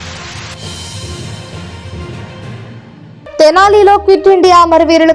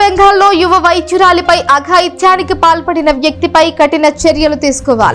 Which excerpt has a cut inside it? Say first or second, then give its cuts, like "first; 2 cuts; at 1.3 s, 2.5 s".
first; 1 cut; at 3.4 s